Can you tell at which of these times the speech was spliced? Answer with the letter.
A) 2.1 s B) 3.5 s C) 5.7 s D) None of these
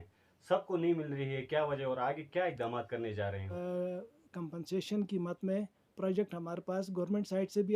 B